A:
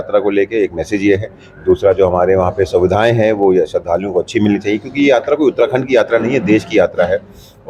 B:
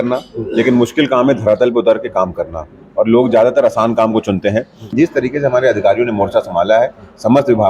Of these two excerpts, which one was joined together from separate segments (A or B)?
B